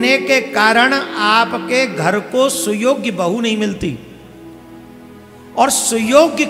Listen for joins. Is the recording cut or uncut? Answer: uncut